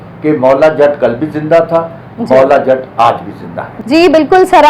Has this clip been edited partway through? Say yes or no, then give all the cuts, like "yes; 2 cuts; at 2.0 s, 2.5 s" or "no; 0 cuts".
no; 0 cuts